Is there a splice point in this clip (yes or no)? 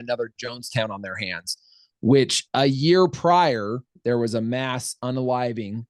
yes